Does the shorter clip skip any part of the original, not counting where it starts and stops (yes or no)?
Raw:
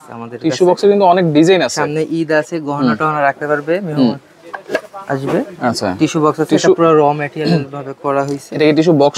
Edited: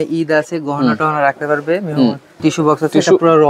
yes